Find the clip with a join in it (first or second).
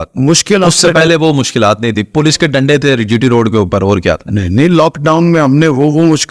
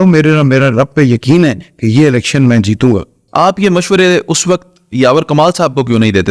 second